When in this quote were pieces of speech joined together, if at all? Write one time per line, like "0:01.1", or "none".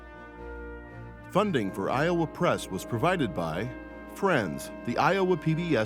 0:01.3